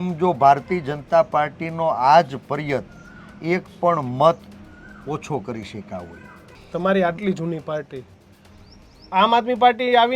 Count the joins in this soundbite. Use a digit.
1